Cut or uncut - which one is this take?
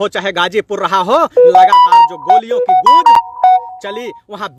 uncut